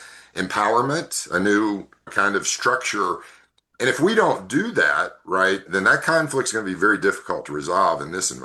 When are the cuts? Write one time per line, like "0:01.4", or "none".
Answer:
0:05.6